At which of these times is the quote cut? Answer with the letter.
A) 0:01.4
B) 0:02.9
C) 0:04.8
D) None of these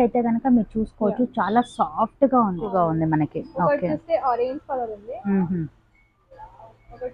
B